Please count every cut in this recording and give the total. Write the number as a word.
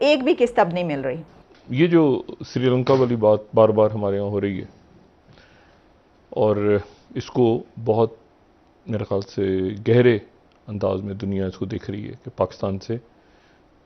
one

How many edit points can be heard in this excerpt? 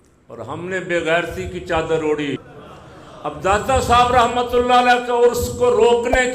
one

